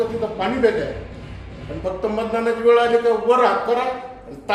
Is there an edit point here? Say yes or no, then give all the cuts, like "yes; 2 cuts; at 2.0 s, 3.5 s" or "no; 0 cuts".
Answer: no; 0 cuts